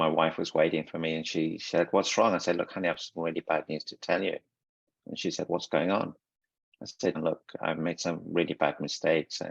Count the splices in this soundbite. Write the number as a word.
one